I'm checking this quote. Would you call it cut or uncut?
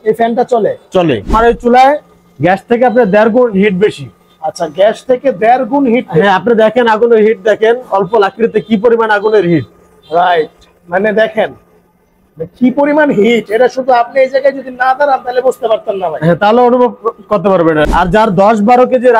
cut